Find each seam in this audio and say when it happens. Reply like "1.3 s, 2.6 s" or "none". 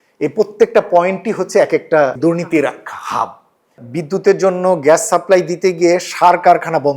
2.2 s, 3.8 s